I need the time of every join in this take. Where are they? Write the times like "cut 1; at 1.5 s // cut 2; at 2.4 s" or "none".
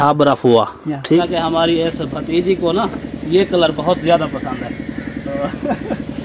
cut 1; at 1.2 s